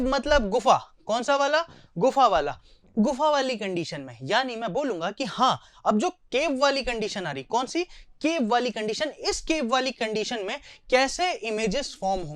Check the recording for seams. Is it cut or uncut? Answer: uncut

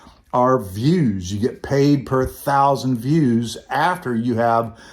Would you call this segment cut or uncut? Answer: uncut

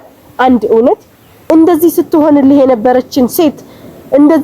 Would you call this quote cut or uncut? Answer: cut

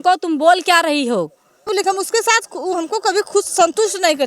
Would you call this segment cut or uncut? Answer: cut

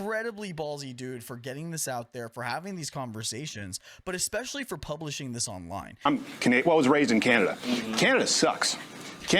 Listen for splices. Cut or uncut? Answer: cut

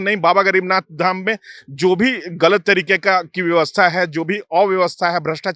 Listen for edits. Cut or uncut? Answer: uncut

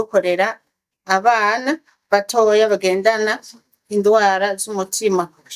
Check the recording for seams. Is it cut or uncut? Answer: uncut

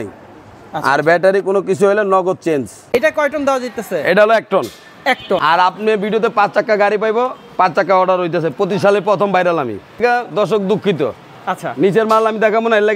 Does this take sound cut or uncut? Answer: cut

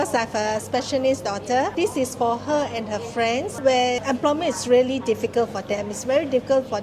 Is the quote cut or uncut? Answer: cut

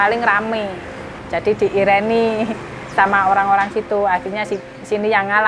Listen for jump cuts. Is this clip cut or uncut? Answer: cut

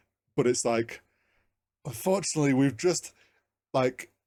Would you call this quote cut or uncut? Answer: uncut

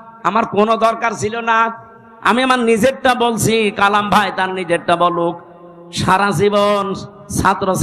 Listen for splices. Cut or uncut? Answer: uncut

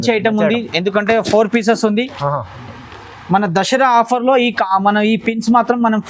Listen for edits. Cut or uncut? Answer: uncut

